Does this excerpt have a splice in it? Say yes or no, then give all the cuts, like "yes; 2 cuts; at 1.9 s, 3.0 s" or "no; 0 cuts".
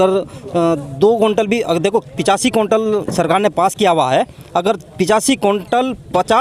no; 0 cuts